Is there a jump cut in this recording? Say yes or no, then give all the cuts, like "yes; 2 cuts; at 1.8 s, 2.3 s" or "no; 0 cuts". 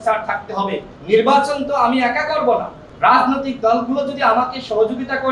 yes; 2 cuts; at 0.9 s, 2.8 s